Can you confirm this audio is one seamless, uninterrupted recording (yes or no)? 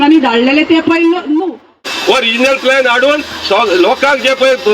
no